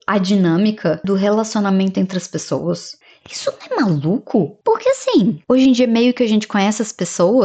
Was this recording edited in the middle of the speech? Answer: no; 0 cuts

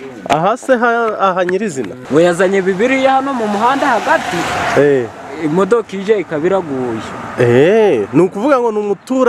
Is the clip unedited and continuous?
no; 1 cut; at 2.0 s

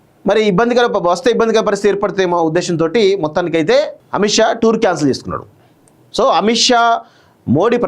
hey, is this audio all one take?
no; 1 cut; at 4.0 s

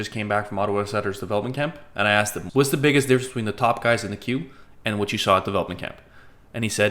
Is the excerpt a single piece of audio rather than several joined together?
no; 1 cut; at 2.4 s

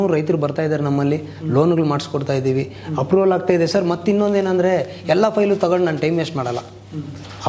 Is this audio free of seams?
yes; 0 cuts

